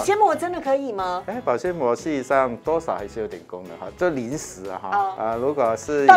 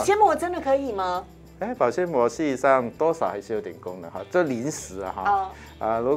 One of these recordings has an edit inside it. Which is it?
first; 2 cuts; at 1.3 s, 5.2 s

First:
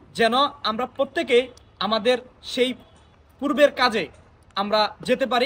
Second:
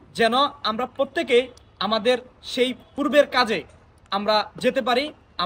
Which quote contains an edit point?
second; 1 cut; at 2.8 s

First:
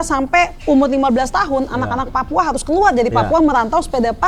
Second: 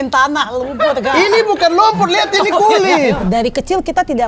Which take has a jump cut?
second; 1 cut; at 3.2 s

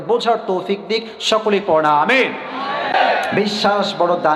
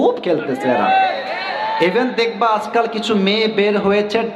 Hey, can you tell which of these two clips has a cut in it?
first; 1 cut; at 2.9 s

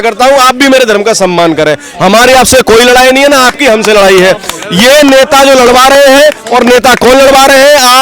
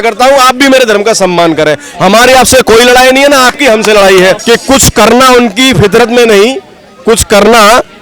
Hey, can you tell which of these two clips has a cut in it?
second; 1 cut; at 4.4 s

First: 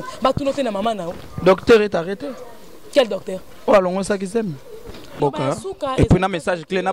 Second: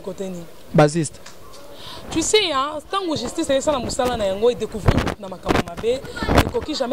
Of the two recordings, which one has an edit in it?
first; 1 cut; at 5.1 s

